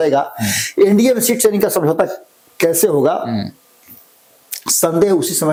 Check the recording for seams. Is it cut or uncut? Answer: uncut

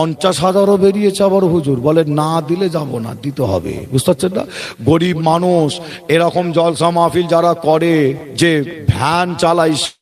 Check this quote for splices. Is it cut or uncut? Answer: uncut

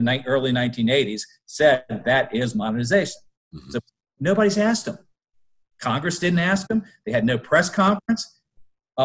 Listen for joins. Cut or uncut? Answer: uncut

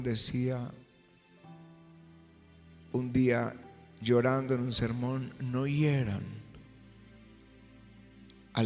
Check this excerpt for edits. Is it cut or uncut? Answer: uncut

